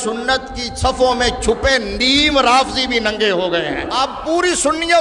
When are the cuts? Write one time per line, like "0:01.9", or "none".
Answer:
0:03.9